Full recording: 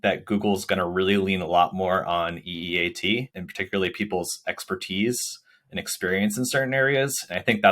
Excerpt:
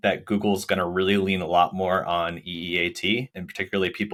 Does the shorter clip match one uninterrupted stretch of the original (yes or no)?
yes